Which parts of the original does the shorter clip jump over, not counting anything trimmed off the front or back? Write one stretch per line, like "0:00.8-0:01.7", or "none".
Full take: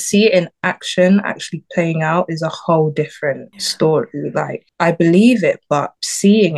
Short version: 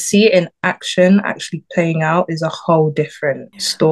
none

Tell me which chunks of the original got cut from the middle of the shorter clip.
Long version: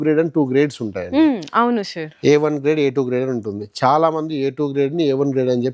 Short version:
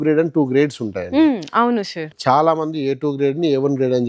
0:02.0-0:03.6

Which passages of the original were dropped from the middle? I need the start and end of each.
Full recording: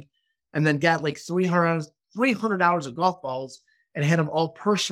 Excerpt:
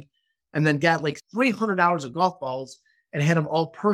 0:01.2-0:02.0

